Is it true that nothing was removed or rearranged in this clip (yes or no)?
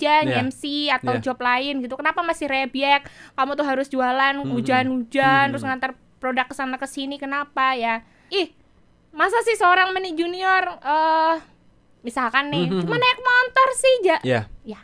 no